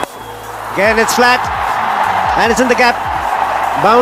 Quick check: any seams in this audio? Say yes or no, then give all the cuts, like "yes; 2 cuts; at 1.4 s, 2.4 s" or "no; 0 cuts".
no; 0 cuts